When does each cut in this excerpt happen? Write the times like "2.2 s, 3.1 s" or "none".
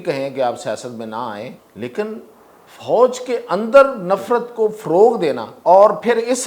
1.6 s, 5.5 s

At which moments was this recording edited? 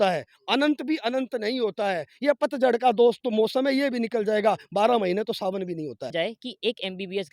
6.1 s

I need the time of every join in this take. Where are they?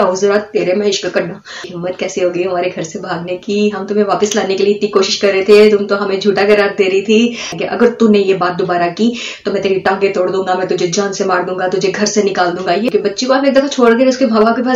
1.7 s, 7.6 s, 12.9 s

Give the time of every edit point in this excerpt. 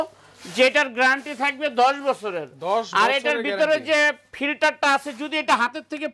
none

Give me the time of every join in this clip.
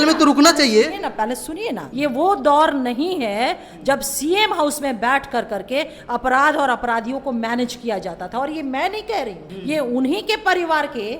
1.8 s, 9.5 s

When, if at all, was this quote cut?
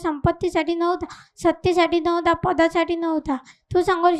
none

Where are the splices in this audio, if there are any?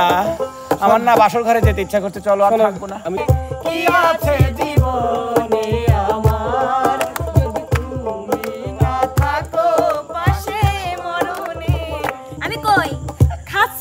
3.2 s, 12.4 s

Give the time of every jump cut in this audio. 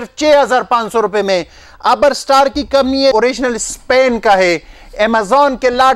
3.1 s

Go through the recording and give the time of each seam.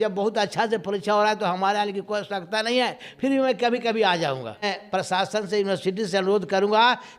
4.8 s

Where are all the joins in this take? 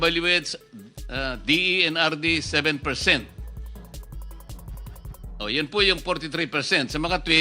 none

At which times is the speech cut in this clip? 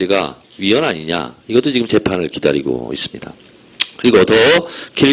none

